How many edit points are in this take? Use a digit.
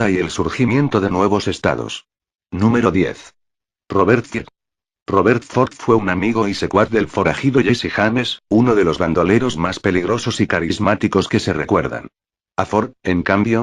1